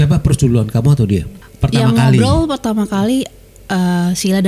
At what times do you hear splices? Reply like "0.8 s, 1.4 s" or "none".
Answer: 1.4 s